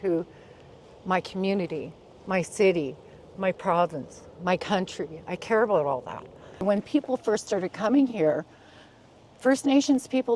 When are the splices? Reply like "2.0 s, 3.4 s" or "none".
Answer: 6.6 s